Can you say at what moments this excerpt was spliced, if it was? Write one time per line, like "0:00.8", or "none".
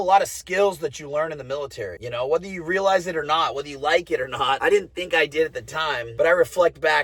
none